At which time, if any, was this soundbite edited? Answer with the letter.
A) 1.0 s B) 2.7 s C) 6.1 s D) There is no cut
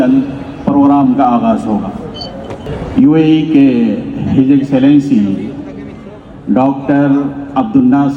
B